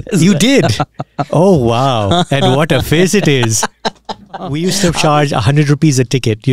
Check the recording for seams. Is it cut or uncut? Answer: cut